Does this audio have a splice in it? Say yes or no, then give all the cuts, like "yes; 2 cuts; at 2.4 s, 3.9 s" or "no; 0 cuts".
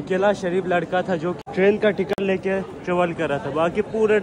yes; 1 cut; at 1.4 s